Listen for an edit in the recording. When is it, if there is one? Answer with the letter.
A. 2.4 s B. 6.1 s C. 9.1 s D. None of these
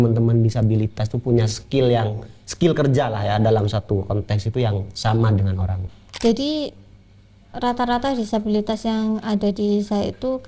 B